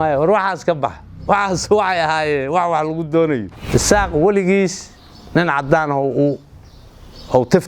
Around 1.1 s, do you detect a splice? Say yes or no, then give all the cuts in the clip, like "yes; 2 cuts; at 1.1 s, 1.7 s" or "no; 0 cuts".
no; 1 cut; at 3.5 s